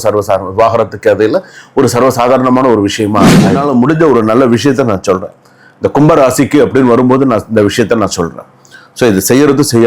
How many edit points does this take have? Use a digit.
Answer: 1